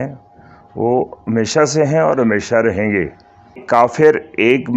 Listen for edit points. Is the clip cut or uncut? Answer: cut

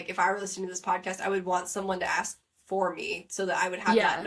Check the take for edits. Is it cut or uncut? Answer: uncut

